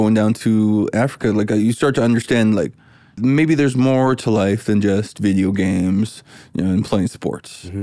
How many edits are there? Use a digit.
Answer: 1